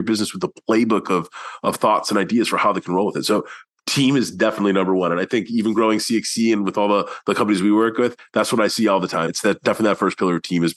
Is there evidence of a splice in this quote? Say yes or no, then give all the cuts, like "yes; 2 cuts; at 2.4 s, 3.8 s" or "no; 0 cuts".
yes; 1 cut; at 9.3 s